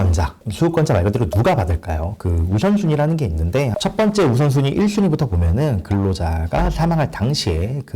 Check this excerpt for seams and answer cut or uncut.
cut